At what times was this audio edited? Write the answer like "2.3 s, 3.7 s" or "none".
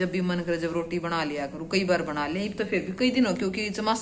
none